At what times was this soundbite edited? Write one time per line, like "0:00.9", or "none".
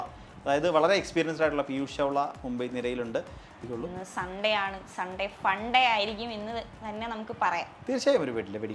0:03.6